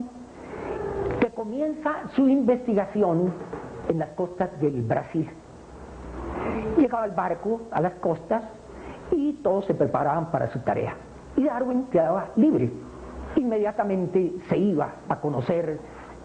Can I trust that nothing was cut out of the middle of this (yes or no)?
no